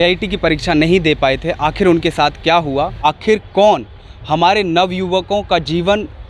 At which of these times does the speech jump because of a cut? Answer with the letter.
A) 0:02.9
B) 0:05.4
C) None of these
A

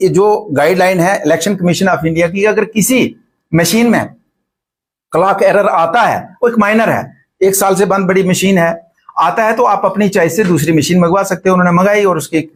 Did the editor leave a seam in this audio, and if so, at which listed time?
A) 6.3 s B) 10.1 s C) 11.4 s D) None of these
D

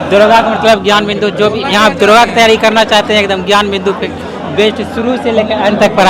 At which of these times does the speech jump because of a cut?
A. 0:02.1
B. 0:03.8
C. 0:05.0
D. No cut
D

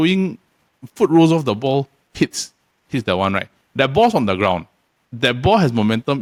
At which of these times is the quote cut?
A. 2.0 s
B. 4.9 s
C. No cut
C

